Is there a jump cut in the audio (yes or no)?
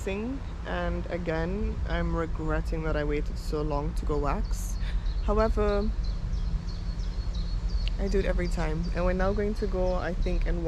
no